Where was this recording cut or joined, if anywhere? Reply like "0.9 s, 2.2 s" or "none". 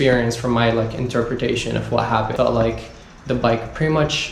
2.3 s